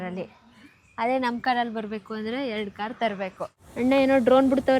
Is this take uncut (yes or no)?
no